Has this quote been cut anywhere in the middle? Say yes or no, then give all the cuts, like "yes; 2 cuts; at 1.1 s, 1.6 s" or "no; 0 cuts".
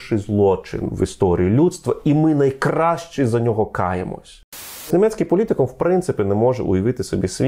yes; 1 cut; at 4.9 s